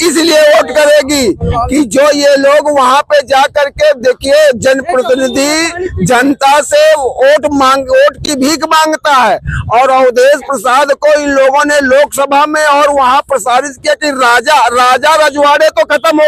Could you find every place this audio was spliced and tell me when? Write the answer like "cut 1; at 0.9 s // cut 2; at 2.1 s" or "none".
none